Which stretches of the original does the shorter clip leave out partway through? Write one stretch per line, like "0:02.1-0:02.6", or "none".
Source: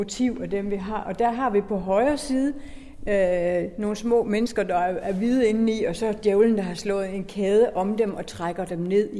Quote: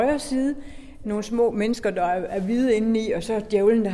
0:03.0-0:03.7